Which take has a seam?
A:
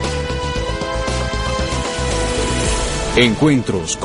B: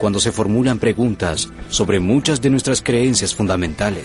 A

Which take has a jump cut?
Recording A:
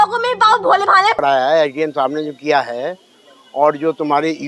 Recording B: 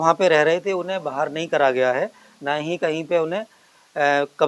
A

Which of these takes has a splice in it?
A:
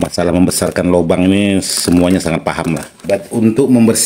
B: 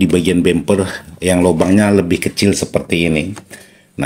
A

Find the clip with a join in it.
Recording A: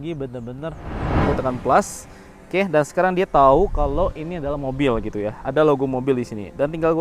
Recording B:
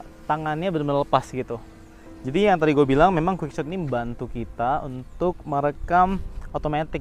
A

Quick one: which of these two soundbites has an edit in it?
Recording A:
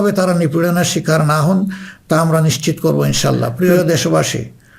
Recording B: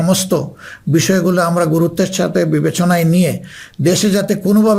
A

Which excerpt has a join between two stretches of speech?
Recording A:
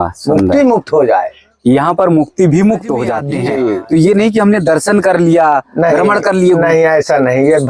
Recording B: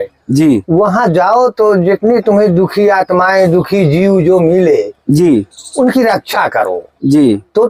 A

